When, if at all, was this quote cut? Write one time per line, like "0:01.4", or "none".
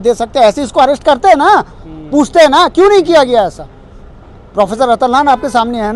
none